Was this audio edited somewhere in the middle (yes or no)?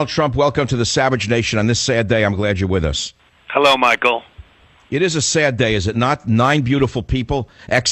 no